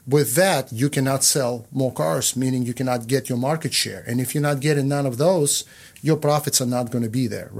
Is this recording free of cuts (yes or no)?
yes